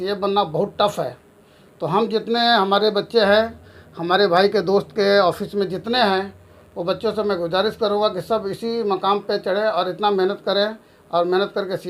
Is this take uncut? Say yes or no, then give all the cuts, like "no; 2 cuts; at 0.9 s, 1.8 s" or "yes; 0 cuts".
yes; 0 cuts